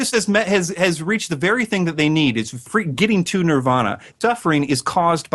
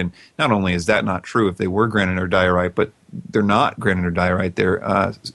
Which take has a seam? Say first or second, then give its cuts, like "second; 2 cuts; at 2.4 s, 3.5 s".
first; 2 cuts; at 2.6 s, 4.1 s